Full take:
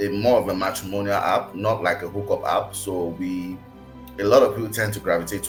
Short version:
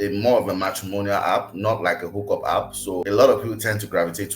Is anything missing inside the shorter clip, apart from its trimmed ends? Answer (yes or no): yes